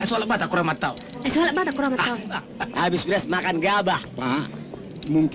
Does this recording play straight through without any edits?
no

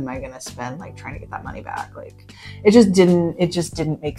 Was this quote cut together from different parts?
no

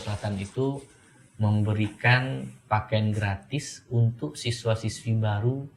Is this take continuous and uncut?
yes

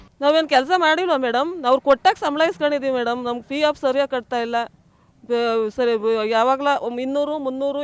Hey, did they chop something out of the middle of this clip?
no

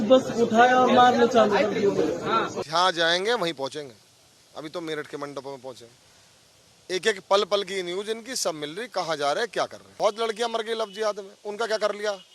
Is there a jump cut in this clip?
yes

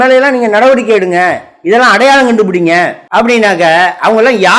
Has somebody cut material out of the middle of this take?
yes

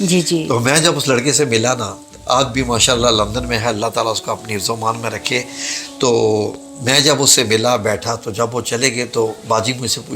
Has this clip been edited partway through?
no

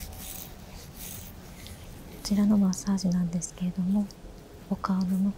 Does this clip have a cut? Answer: yes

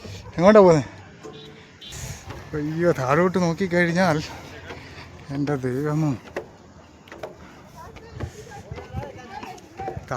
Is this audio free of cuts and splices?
no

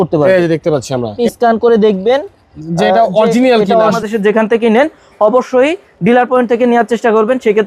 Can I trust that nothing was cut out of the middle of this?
no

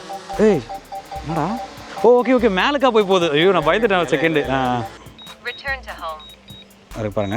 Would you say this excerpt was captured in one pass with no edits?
no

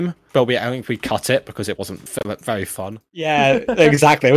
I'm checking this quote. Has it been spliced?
yes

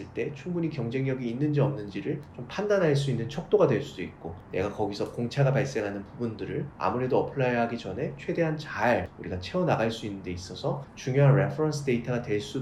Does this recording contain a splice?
no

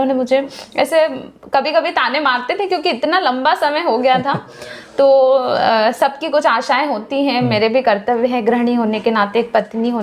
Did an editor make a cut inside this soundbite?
no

